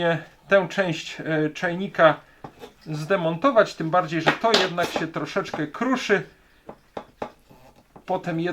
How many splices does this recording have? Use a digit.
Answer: 0